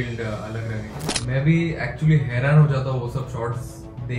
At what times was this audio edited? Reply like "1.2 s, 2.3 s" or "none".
1.1 s